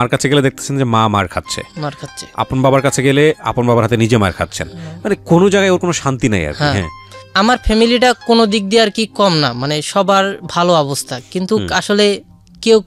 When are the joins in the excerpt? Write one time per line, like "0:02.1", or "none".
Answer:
none